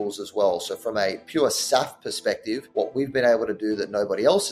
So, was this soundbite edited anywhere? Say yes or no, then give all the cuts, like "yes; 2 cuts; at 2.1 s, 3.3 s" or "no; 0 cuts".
yes; 1 cut; at 2.6 s